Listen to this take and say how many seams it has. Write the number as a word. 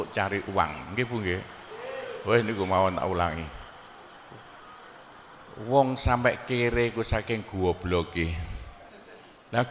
zero